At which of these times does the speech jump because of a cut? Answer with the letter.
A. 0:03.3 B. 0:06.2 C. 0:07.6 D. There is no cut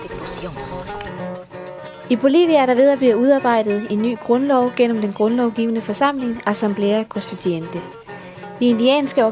B